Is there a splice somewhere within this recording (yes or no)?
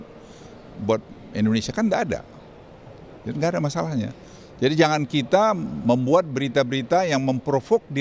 no